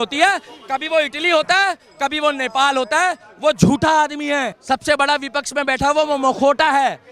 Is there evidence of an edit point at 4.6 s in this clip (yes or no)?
yes